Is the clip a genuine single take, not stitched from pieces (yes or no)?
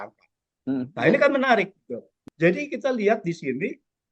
no